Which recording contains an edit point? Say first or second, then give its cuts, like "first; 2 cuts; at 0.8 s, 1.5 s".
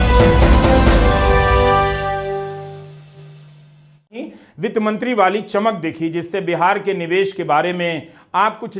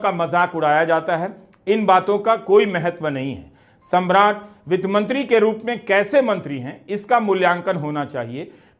first; 1 cut; at 4.2 s